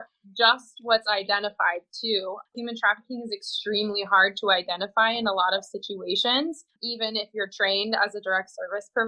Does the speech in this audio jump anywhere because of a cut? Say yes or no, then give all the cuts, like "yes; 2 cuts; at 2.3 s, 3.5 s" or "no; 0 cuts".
no; 0 cuts